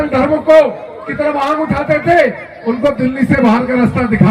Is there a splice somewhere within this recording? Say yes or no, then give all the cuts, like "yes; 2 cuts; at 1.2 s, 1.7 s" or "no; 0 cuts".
no; 0 cuts